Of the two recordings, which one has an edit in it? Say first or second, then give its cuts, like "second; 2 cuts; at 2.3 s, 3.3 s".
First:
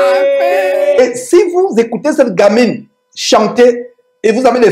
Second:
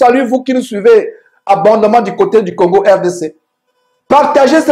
first; 1 cut; at 1.0 s